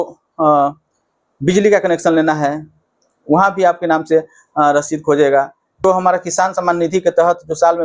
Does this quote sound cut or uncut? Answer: cut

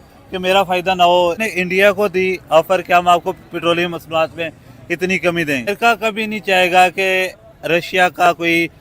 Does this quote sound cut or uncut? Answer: cut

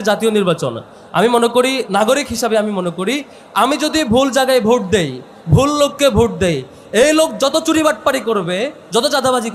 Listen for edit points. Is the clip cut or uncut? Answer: uncut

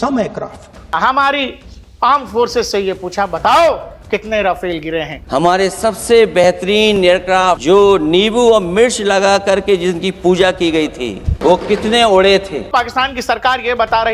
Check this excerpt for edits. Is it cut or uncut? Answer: cut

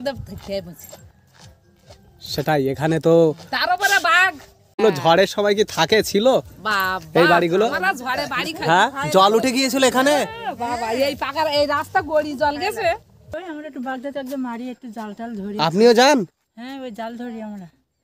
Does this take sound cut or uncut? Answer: cut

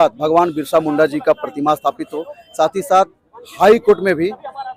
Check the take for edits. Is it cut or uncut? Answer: uncut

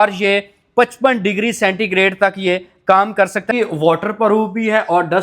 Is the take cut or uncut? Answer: cut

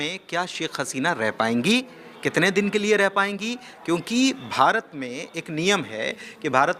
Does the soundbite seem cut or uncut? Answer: uncut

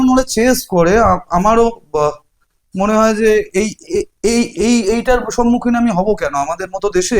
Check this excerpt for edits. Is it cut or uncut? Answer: uncut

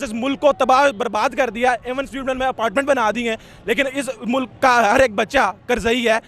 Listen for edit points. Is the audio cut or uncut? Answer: uncut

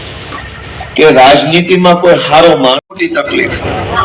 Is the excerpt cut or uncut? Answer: cut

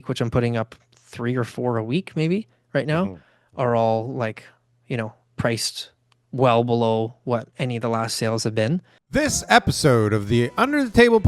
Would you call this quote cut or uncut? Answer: cut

